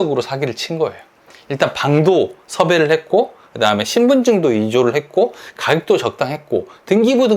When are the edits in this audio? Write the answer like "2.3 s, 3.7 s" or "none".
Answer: none